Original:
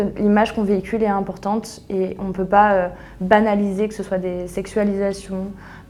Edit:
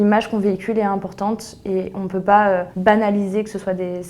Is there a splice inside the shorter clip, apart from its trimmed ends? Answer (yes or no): yes